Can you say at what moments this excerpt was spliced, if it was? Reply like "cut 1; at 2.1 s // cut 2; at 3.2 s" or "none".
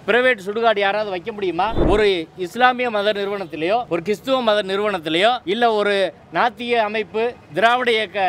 cut 1; at 1.8 s // cut 2; at 3.9 s // cut 3; at 5.4 s